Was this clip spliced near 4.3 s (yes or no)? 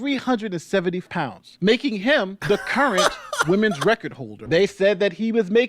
yes